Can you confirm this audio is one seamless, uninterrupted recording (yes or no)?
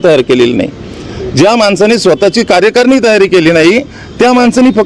yes